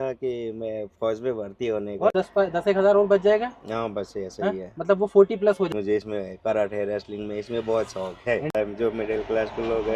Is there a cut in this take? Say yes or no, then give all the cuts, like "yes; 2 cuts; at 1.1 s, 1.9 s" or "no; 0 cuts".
yes; 3 cuts; at 2.1 s, 5.7 s, 8.6 s